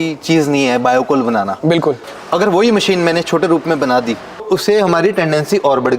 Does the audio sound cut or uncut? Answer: cut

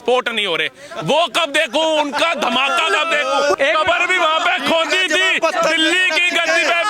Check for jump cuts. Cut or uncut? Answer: cut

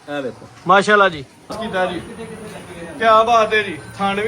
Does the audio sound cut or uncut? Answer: cut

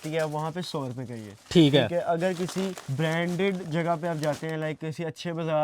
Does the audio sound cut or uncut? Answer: cut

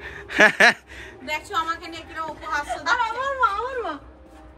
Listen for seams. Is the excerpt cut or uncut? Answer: uncut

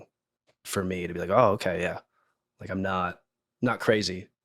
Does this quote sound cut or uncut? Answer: cut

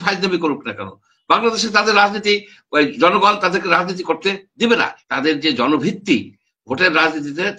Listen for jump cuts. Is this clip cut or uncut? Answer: cut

